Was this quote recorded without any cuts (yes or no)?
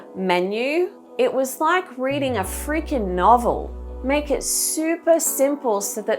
no